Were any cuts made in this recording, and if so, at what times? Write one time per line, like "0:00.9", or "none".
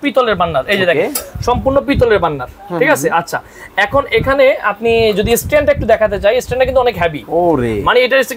none

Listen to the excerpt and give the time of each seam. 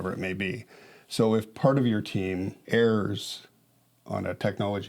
0:02.6

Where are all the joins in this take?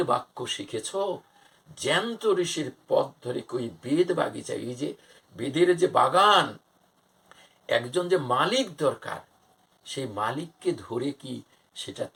none

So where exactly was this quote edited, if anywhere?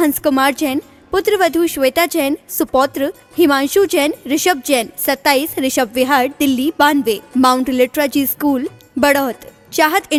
none

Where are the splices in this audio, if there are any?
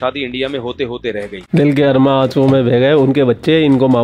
0:01.4

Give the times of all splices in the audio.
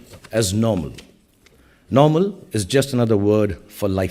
none

